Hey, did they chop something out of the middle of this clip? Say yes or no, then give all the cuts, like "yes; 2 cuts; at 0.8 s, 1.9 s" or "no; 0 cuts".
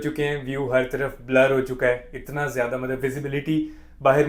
no; 0 cuts